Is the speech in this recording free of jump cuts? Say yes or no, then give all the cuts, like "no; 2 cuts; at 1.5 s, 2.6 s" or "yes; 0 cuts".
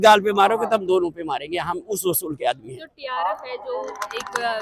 yes; 0 cuts